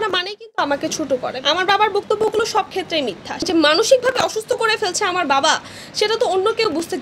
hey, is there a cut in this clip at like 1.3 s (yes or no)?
yes